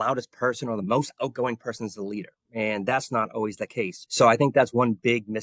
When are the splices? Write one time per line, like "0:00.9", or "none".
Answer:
0:04.0